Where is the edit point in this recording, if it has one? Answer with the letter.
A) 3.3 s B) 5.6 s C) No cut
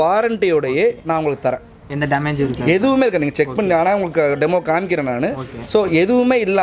C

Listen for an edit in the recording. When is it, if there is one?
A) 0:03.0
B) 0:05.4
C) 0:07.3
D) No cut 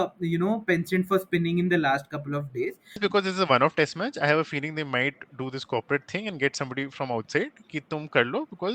A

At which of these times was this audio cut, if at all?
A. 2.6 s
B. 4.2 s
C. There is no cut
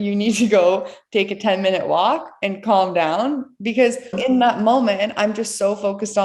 B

